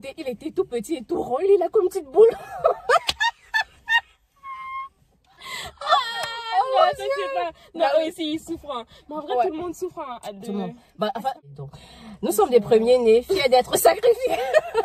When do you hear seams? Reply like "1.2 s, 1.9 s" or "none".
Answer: 11.5 s